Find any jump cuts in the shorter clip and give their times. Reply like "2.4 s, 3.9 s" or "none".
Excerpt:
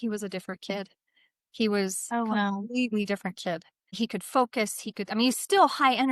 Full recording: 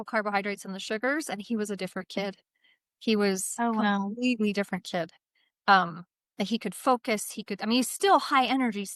3.8 s